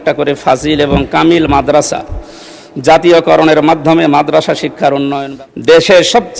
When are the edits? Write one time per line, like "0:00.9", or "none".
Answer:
0:05.2